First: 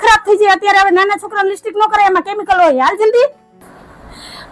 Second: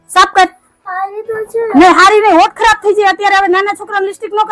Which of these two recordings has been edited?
first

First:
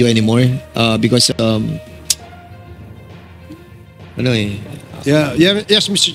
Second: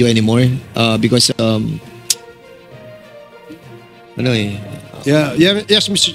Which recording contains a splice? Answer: first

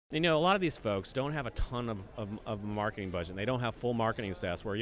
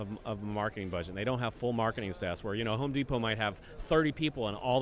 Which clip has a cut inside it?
first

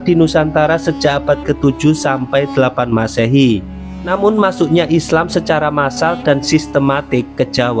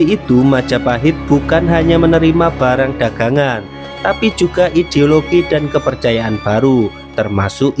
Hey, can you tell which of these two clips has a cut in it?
first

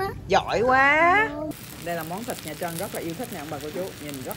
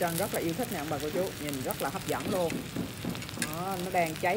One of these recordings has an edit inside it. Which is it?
first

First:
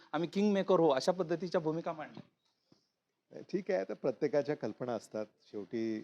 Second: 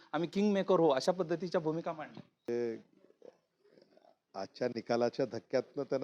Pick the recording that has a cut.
second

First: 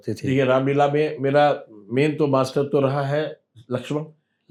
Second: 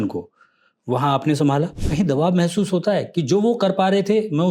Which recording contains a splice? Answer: second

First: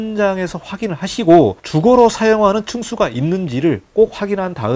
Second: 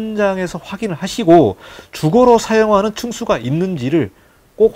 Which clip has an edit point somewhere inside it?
first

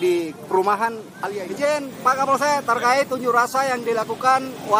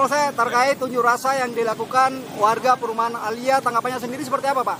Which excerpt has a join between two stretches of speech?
first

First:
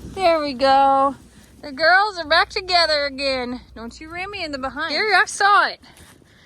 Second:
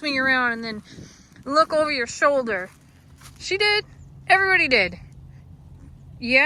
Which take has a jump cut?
first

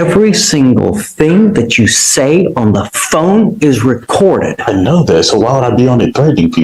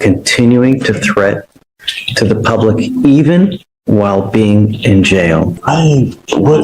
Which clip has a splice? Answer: second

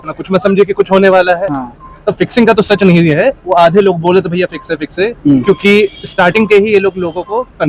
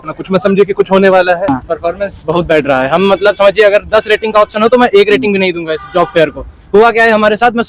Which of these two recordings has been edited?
second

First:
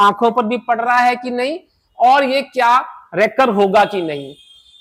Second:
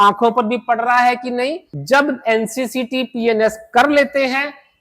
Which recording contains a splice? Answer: second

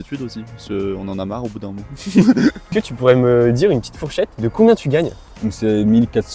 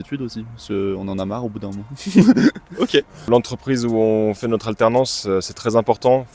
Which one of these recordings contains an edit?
first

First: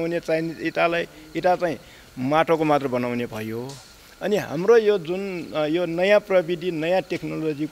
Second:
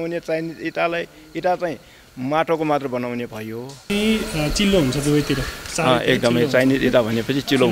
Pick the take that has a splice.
second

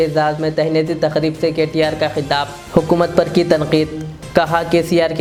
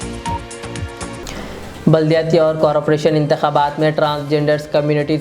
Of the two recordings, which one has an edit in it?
second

